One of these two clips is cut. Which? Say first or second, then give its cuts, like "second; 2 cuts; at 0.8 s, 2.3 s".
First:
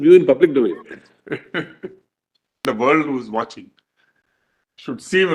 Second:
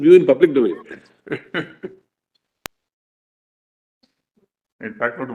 first; 1 cut; at 2.6 s